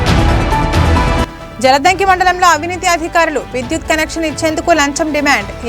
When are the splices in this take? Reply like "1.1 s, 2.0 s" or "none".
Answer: 1.3 s